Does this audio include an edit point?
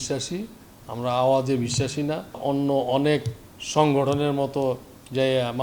yes; 1 cut; at 2.4 s

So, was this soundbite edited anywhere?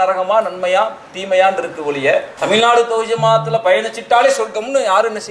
yes; 1 cut; at 2.3 s

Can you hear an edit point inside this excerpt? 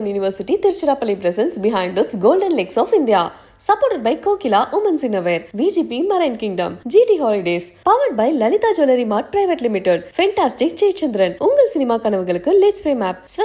no; 0 cuts

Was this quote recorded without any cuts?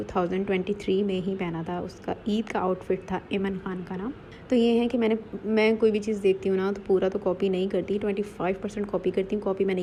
yes; 0 cuts

